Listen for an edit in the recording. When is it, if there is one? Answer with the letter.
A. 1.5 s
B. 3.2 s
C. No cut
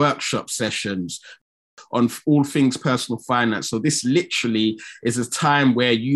A